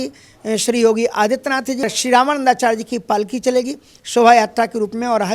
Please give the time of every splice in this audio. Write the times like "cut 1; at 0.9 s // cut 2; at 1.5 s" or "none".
cut 1; at 1.9 s

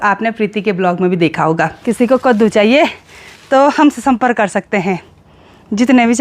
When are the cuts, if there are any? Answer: cut 1; at 1.8 s

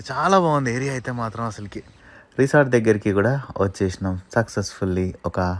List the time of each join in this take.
cut 1; at 2.1 s

